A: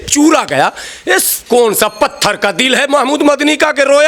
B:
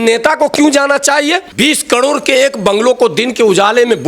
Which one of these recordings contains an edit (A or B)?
B